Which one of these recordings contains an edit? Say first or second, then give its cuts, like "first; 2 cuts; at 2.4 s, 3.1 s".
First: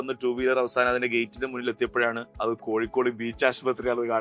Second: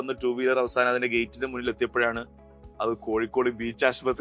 first; 1 cut; at 2.3 s